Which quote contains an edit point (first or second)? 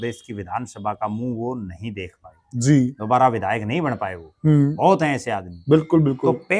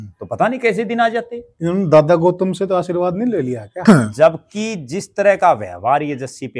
second